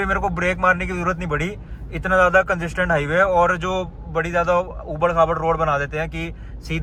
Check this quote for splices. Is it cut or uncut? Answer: uncut